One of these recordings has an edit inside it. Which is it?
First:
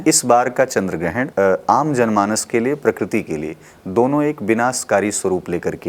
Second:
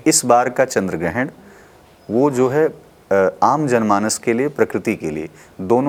first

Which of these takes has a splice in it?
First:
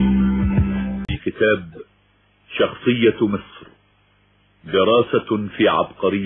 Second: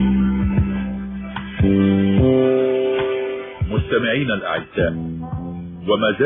first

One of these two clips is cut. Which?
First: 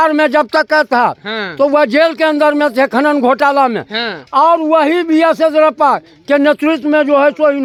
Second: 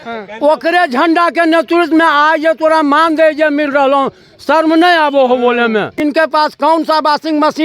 second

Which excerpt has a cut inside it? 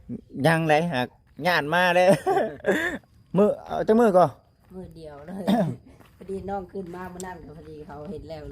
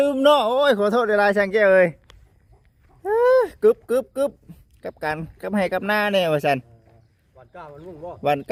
first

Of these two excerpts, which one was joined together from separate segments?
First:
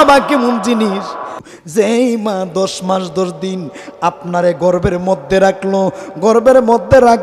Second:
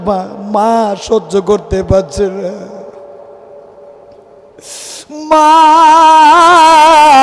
first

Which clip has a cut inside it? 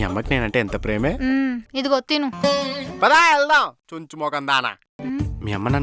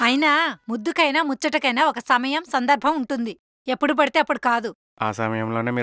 first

